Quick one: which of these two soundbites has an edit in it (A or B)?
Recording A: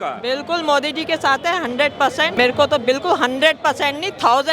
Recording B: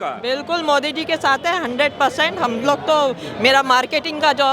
A